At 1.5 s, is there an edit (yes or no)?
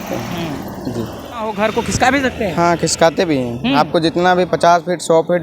yes